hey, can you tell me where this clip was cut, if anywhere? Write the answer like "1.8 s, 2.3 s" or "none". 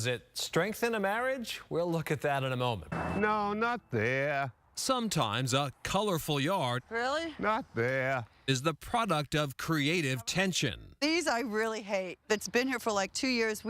2.9 s